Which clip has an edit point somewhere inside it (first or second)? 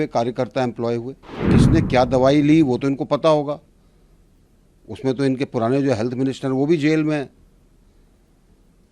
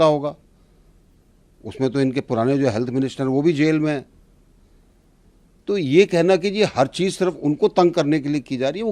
first